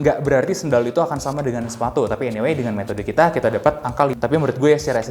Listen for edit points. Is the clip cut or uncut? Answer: cut